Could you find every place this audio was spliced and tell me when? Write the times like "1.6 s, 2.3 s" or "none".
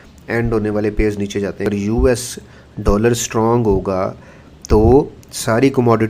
1.7 s